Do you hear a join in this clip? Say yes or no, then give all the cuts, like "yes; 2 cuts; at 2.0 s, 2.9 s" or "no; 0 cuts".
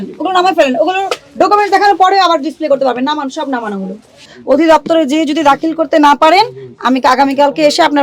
yes; 1 cut; at 4.3 s